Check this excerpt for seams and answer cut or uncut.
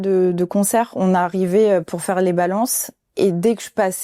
uncut